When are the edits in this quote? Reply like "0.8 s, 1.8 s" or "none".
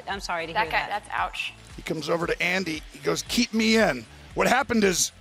1.7 s